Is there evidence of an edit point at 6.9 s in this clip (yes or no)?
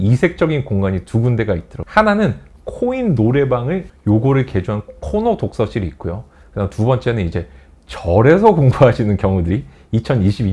no